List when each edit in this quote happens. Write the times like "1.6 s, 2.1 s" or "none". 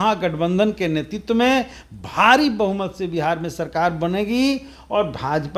none